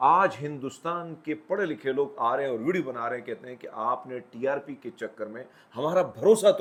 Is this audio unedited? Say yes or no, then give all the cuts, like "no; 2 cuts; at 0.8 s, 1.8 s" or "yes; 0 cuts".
yes; 0 cuts